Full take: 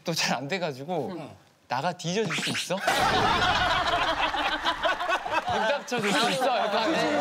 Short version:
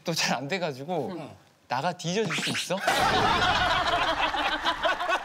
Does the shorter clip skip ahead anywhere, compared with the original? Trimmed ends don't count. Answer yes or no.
no